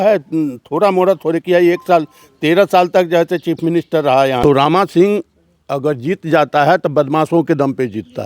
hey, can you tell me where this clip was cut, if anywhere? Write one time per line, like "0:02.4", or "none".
0:04.4

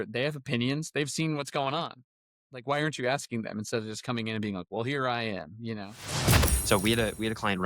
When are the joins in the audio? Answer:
0:02.6
0:06.4

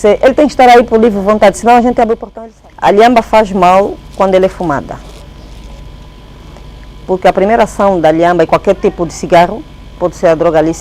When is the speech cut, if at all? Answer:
0:02.3

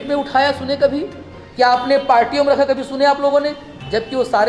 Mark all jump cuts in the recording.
none

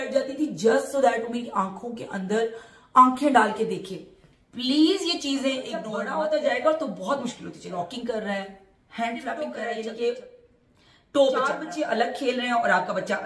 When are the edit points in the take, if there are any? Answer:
0:06.0
0:07.7
0:09.6
0:11.7

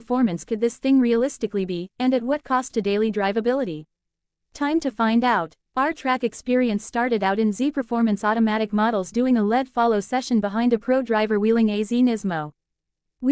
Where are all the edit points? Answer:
0:04.3

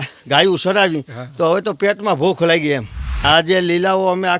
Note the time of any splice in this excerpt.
0:03.2

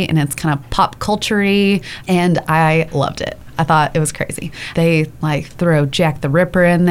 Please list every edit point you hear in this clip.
0:01.9
0:04.7

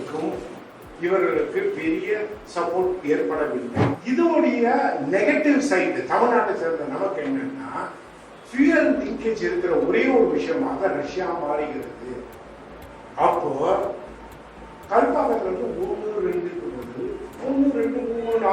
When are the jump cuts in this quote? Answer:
0:04.0

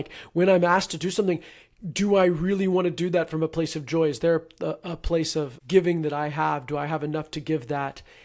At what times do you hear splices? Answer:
0:05.6

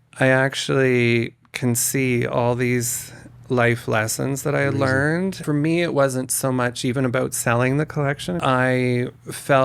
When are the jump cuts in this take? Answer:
0:05.4
0:08.4

